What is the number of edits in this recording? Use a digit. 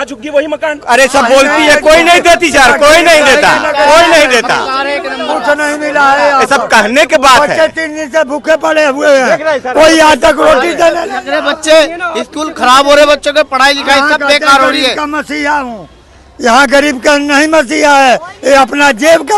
0